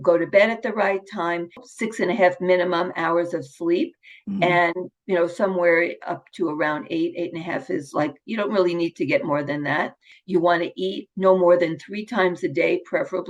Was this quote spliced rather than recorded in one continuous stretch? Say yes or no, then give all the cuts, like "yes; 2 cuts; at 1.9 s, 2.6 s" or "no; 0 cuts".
yes; 2 cuts; at 1.6 s, 10.1 s